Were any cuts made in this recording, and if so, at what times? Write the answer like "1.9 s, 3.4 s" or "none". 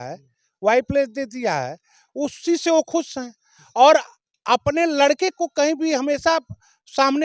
none